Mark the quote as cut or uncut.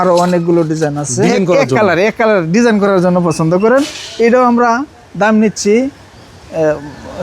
cut